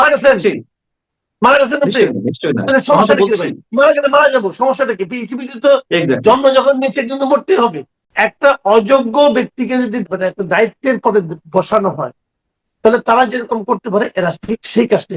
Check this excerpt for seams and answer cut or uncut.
cut